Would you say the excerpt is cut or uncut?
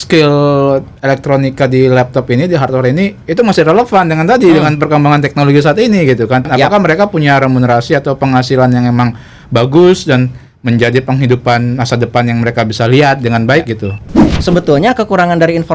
cut